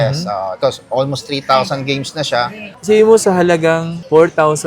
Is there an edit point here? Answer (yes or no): yes